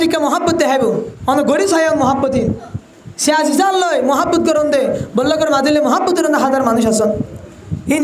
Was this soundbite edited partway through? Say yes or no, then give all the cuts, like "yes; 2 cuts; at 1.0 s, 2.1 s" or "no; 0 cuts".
yes; 1 cut; at 1.1 s